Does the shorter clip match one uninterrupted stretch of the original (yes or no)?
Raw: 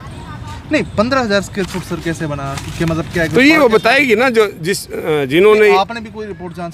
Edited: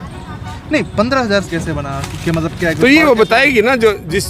no